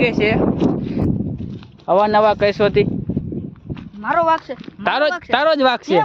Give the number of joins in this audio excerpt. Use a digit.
1